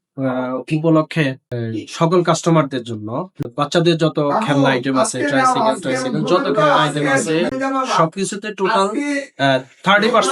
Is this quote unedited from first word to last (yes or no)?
no